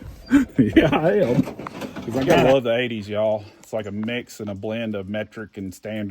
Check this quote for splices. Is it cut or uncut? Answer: cut